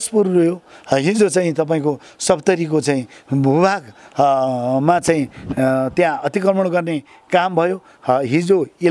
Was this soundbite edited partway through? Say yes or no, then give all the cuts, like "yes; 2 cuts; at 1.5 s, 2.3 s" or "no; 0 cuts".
no; 0 cuts